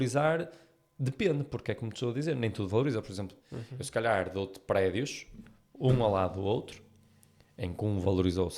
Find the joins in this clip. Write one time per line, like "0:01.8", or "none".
0:03.3